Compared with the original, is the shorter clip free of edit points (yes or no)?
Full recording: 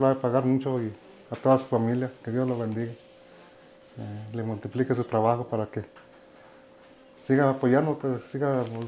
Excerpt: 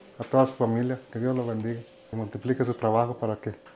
no